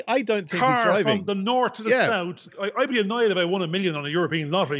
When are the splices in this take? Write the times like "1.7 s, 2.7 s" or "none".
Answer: 2.6 s